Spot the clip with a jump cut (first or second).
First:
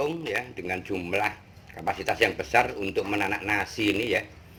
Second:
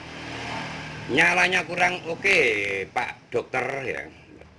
second